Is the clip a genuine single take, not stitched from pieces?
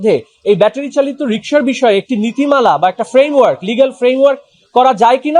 yes; 0 cuts

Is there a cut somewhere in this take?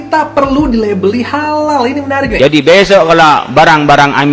yes; 1 cut; at 2.3 s

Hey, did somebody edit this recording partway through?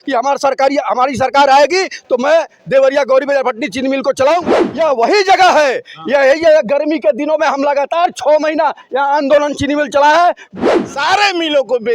yes; 2 cuts; at 4.5 s, 10.5 s

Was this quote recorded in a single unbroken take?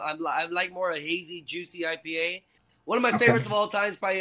no; 1 cut; at 2.7 s

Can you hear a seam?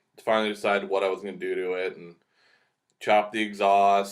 yes; 1 cut; at 2.7 s

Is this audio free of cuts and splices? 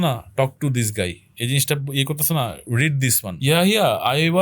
no; 1 cut; at 3.1 s

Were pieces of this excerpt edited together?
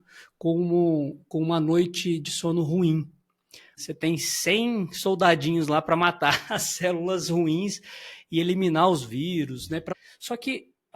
yes; 2 cuts; at 3.7 s, 9.9 s

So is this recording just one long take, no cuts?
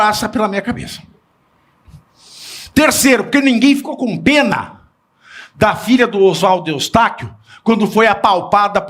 yes; 0 cuts

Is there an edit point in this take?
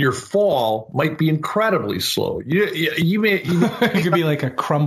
no; 0 cuts

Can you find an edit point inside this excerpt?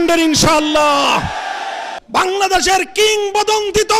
yes; 1 cut; at 1.9 s

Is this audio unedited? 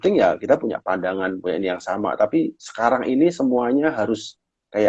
yes; 0 cuts

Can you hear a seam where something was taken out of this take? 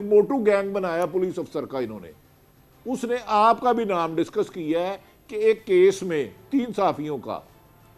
no; 0 cuts

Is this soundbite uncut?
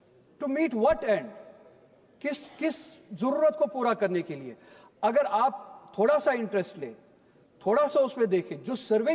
yes; 0 cuts

